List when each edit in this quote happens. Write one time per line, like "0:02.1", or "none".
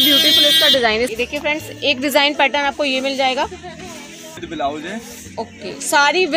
0:01.1